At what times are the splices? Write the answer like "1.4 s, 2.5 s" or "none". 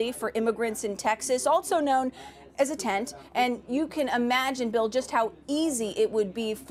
none